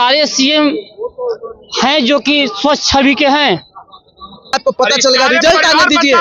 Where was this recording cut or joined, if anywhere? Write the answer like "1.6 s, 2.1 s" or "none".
4.5 s